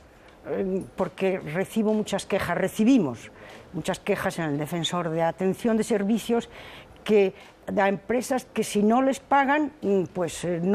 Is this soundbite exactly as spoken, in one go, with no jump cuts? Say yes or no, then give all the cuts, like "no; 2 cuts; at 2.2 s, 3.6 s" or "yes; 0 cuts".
no; 1 cut; at 4.2 s